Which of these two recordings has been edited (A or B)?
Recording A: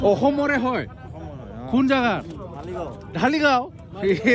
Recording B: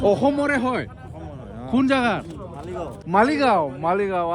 B